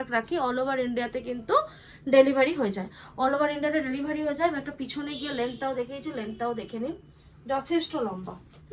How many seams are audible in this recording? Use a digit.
0